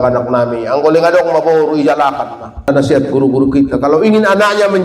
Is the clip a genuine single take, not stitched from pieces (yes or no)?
no